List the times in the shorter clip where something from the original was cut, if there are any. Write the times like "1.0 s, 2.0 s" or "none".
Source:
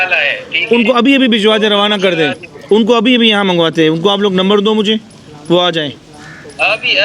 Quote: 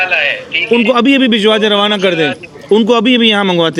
none